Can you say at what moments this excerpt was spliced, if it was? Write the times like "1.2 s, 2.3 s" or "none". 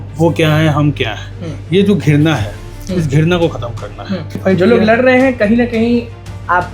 4.4 s